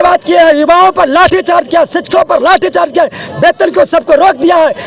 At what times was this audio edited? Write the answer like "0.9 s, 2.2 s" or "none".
none